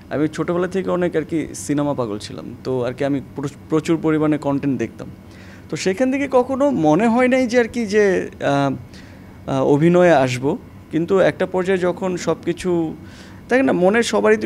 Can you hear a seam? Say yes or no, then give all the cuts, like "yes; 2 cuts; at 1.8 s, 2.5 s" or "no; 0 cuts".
no; 0 cuts